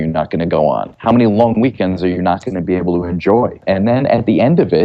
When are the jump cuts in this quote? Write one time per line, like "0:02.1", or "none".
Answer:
0:03.6